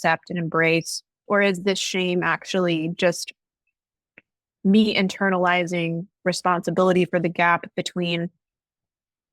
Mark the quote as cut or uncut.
uncut